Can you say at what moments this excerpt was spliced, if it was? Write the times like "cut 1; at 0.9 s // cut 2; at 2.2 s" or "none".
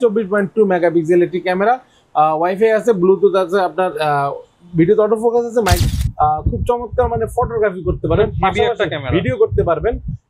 cut 1; at 5.8 s